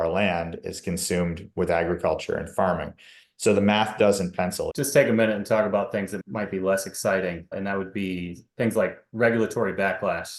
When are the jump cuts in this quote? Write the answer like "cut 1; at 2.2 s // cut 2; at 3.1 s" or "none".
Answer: cut 1; at 4.7 s

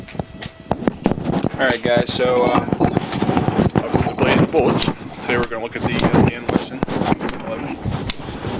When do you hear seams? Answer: cut 1; at 7.6 s

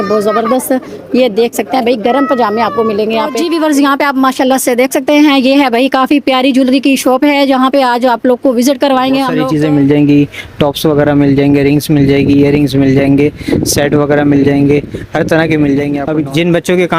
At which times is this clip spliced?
cut 1; at 3.4 s // cut 2; at 9.4 s // cut 3; at 16.0 s

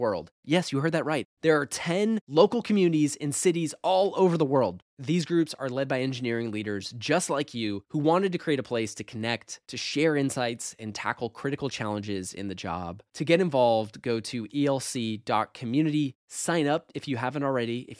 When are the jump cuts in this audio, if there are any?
none

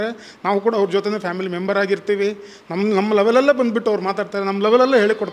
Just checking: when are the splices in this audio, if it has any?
none

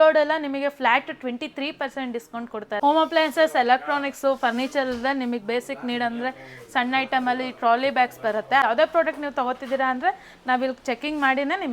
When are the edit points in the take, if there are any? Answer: cut 1; at 2.8 s // cut 2; at 8.6 s

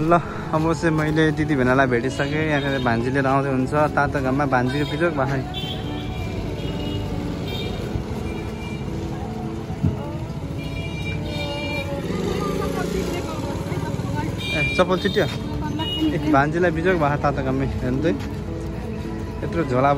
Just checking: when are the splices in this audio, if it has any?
none

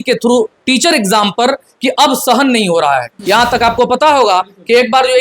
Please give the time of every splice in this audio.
cut 1; at 3.1 s

